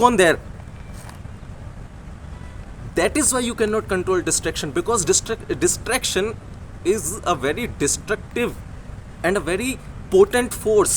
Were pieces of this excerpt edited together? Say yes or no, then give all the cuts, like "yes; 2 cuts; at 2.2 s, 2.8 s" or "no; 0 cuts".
no; 0 cuts